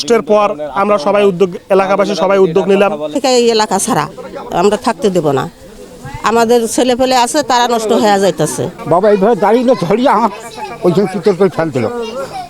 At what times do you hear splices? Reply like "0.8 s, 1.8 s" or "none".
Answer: 3.1 s, 8.7 s

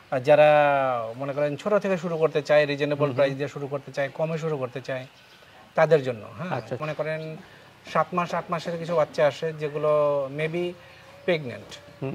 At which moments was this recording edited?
6.8 s

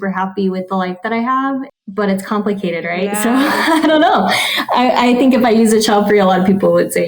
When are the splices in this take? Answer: 1.7 s

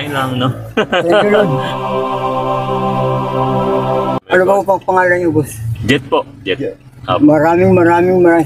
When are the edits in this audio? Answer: none

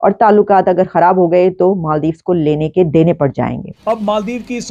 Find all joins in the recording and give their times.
3.7 s

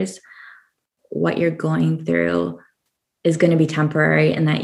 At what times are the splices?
1.0 s

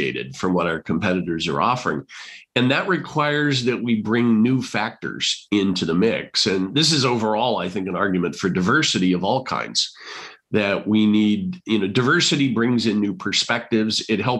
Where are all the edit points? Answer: none

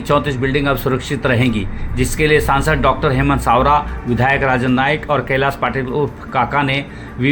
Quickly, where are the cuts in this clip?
none

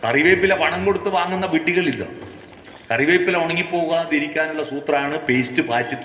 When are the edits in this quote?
none

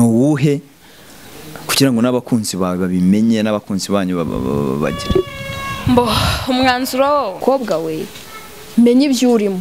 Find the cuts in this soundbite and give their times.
7.4 s

